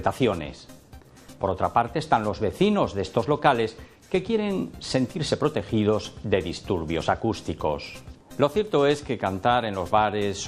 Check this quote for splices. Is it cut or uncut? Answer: uncut